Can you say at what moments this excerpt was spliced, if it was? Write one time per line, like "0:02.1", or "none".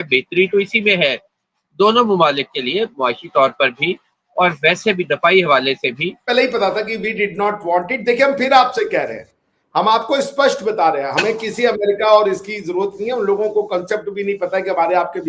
0:06.3